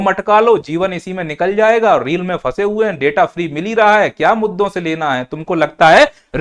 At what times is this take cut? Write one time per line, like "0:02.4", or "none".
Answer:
none